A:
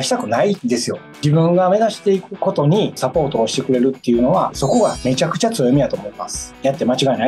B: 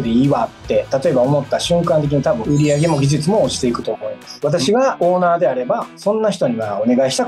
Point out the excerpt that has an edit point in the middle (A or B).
A